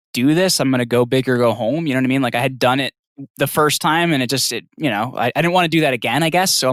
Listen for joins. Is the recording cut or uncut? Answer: uncut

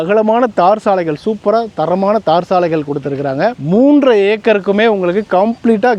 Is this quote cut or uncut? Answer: uncut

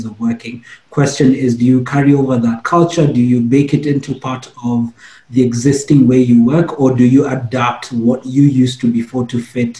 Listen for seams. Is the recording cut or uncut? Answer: uncut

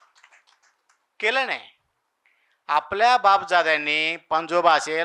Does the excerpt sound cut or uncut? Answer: uncut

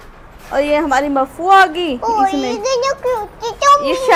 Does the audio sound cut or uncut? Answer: uncut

